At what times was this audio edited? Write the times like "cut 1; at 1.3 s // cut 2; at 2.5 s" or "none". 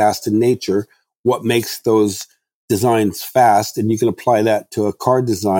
none